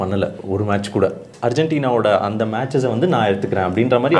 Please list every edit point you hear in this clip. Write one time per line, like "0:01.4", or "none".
0:01.3